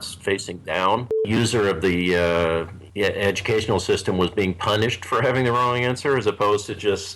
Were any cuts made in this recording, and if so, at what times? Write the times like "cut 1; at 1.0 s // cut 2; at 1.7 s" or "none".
cut 1; at 1.2 s // cut 2; at 2.8 s